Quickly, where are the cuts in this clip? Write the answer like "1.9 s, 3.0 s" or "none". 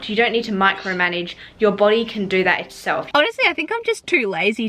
3.1 s